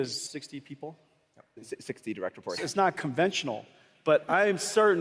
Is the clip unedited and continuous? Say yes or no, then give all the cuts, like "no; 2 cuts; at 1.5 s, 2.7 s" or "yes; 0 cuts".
no; 1 cut; at 2.6 s